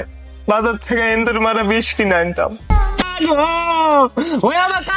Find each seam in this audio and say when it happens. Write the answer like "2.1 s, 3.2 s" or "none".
3.1 s